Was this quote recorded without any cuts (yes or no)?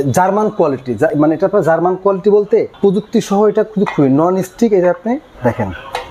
yes